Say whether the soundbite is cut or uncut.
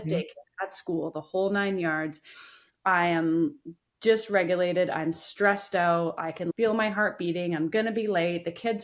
uncut